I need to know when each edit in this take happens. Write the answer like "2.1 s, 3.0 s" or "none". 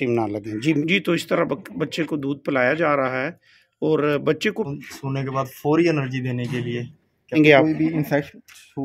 0.8 s, 4.7 s, 7.4 s